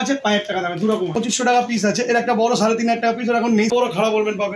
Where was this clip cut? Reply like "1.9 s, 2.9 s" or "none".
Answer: 1.0 s, 3.7 s